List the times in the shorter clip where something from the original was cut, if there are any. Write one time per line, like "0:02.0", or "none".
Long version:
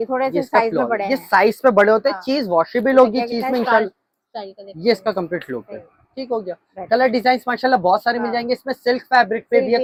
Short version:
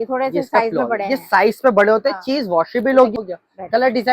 0:03.2

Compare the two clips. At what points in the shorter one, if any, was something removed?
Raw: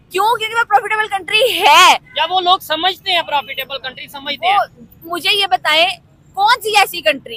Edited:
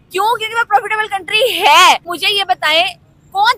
0:02.1

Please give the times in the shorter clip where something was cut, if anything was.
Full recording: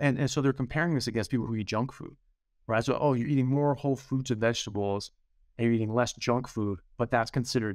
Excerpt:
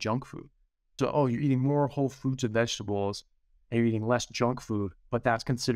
0:01.0

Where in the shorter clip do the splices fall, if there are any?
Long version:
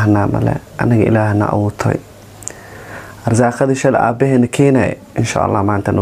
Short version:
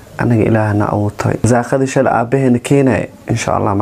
0:01.4

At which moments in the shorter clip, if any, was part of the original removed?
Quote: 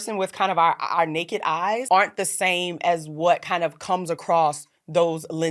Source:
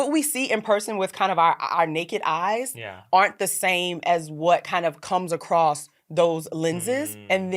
0:01.8

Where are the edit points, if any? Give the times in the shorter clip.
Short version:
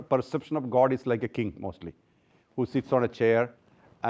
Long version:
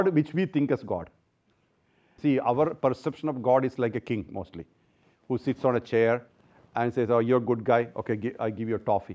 none

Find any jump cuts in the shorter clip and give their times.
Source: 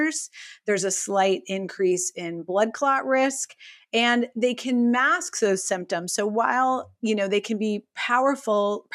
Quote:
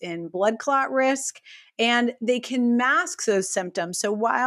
none

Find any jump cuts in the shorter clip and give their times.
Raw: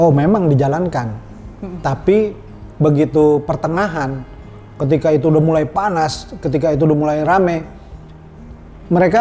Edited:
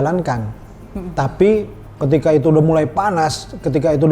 0:01.8

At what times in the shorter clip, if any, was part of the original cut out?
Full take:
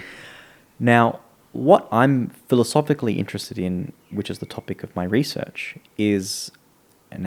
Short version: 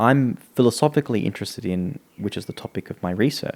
none

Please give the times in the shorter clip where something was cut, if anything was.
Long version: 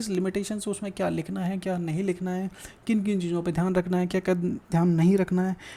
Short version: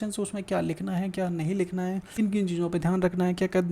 0:02.2

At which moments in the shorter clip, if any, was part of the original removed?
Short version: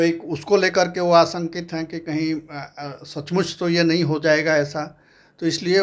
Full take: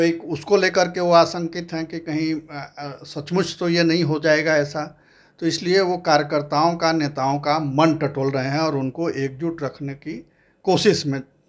none

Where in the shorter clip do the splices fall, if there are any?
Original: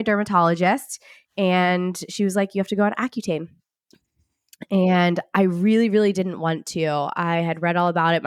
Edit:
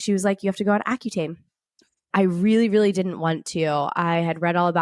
0:02.1

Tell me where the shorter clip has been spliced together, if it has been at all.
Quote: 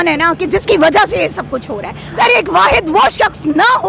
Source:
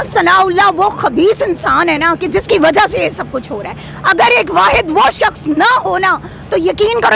0:02.1

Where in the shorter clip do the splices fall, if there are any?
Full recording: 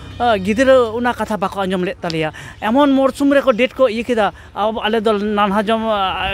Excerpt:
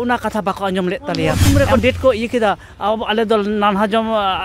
0:01.4

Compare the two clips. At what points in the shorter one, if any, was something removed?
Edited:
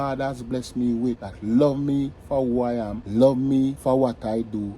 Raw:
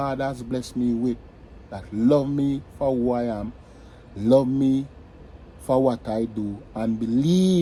0:01.3
0:03.0
0:03.8

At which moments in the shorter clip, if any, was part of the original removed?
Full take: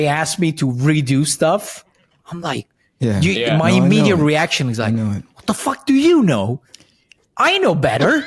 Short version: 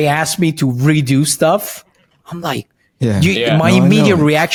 none

